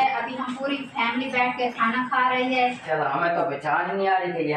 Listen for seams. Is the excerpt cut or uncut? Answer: cut